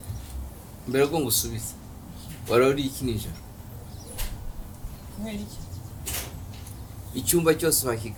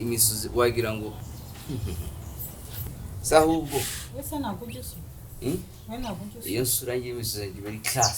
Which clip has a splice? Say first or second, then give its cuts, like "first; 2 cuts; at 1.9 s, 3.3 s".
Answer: second; 1 cut; at 2.9 s